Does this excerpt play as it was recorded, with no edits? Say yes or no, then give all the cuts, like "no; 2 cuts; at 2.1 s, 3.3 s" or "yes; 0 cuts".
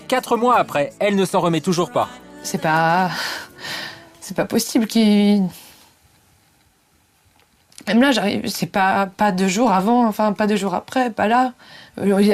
yes; 0 cuts